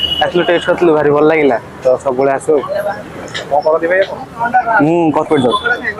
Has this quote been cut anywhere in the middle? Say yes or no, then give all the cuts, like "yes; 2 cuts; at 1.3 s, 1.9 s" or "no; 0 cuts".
no; 0 cuts